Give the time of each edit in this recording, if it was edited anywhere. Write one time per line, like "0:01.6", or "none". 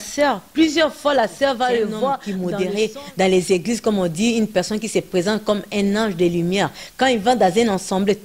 0:02.3